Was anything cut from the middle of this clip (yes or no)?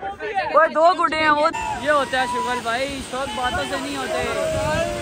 yes